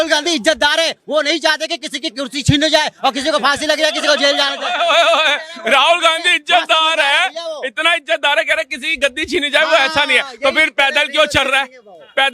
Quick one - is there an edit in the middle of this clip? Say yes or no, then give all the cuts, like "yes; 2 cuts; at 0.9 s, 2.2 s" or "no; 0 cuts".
no; 0 cuts